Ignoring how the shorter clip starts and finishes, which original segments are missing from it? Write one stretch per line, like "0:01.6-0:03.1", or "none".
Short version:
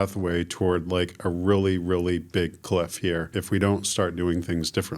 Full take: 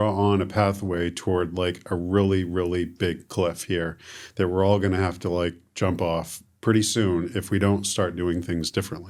0:04.0-0:07.3